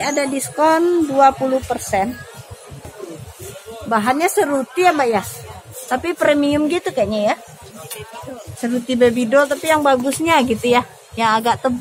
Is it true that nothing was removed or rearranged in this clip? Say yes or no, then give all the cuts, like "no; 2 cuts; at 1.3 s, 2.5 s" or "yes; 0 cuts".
no; 1 cut; at 2.9 s